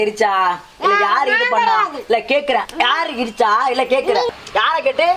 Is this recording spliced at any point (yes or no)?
no